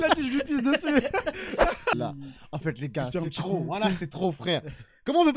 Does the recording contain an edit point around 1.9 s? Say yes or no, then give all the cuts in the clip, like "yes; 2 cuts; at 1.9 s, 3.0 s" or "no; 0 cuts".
yes; 1 cut; at 1.9 s